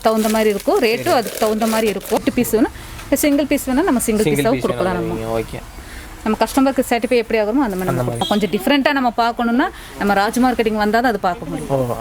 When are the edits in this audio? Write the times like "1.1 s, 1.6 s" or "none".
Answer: 2.2 s, 8.2 s